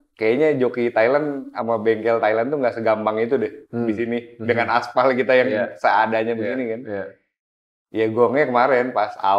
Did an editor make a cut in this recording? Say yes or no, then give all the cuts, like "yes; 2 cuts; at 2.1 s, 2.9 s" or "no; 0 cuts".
no; 0 cuts